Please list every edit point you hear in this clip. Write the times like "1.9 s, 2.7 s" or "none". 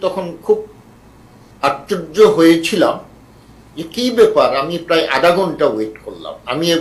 none